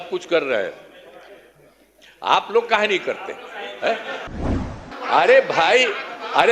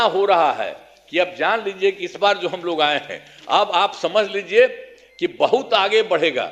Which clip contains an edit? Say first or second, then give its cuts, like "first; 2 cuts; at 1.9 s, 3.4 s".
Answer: first; 1 cut; at 4.3 s